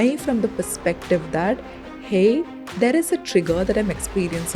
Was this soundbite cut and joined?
no; 0 cuts

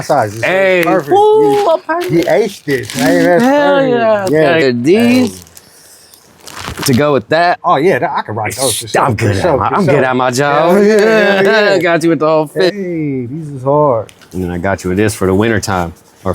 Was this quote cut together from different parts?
yes; 4 cuts; at 4.6 s, 7.6 s, 12.7 s, 14.3 s

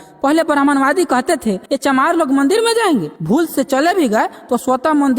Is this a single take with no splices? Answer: no; 2 cuts; at 1.7 s, 3.1 s

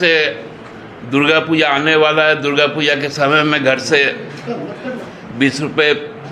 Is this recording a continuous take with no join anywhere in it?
yes; 0 cuts

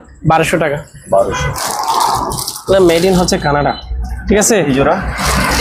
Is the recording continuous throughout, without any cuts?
no; 1 cut; at 1.6 s

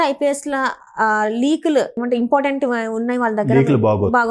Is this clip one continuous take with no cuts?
no; 1 cut; at 2.0 s

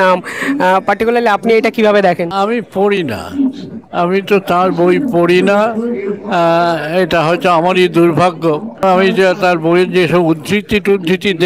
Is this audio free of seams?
no; 2 cuts; at 2.3 s, 8.8 s

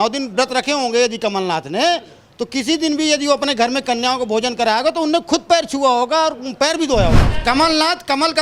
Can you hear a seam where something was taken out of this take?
yes; 1 cut; at 7.3 s

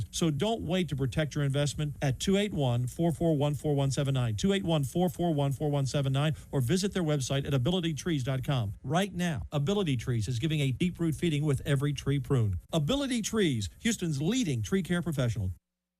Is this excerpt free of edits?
yes; 0 cuts

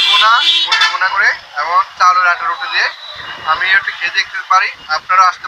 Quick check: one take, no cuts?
yes; 0 cuts

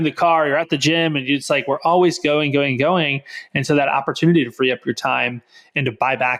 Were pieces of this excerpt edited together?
no; 0 cuts

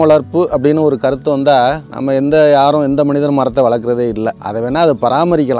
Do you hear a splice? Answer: yes; 2 cuts; at 1.9 s, 4.4 s

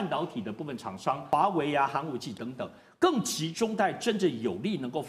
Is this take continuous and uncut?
no; 1 cut; at 1.2 s

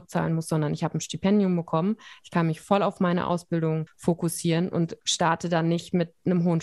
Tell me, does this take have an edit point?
yes; 2 cuts; at 3.9 s, 5.0 s

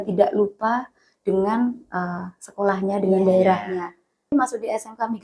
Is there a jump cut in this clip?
yes; 1 cut; at 4.3 s

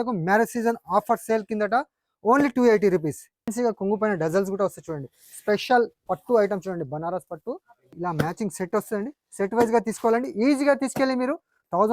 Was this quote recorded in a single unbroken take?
no; 2 cuts; at 3.5 s, 8.0 s

